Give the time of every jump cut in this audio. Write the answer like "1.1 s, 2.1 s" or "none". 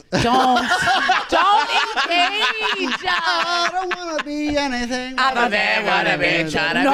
none